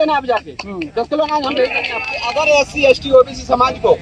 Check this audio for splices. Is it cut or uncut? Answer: cut